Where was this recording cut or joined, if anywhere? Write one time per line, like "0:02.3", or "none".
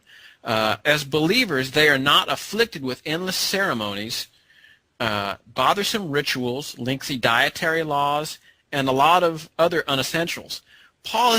0:01.4